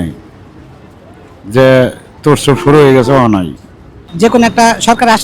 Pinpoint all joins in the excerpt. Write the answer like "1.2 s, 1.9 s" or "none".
4.0 s